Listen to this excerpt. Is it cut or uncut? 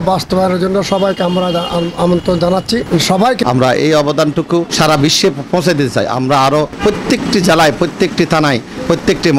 cut